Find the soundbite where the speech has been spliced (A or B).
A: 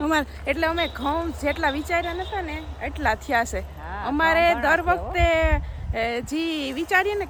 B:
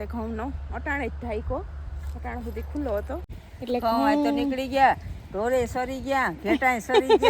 B